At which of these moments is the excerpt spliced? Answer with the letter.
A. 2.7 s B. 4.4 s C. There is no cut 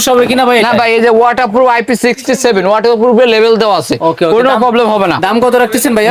C